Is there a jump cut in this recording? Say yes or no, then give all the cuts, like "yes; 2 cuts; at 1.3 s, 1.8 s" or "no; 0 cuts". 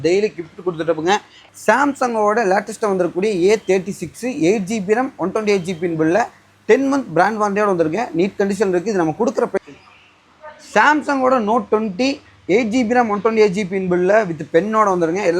yes; 2 cuts; at 1.3 s, 9.5 s